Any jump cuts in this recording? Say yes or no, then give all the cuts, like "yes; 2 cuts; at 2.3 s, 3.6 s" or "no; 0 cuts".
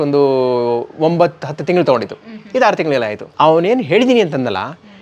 yes; 1 cut; at 3.2 s